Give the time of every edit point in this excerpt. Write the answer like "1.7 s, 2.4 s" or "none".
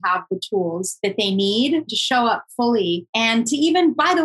0.9 s, 2.0 s, 3.1 s